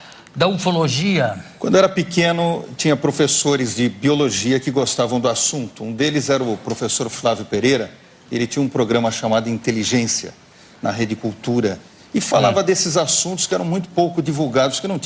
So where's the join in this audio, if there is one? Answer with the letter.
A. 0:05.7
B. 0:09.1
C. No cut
C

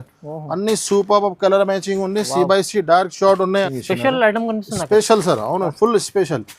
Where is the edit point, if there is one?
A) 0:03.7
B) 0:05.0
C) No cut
A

